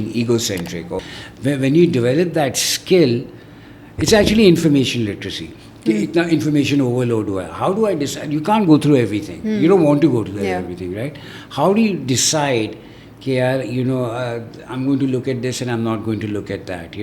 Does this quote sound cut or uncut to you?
cut